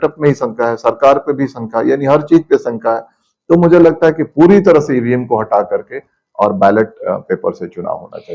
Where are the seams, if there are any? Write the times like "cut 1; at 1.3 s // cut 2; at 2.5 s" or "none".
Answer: none